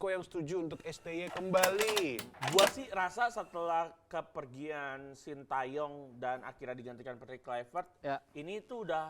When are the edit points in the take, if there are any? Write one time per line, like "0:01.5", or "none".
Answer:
0:02.3